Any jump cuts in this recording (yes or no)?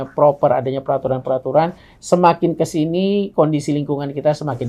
no